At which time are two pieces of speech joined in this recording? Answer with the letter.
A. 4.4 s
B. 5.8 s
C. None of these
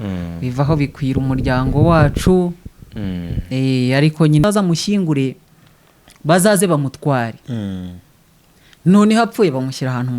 A